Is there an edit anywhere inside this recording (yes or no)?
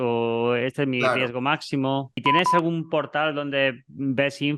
yes